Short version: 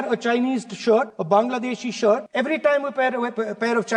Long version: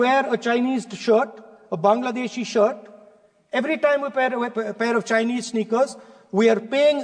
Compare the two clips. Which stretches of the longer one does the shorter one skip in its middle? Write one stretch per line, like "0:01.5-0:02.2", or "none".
0:01.4-0:01.7
0:02.8-0:03.5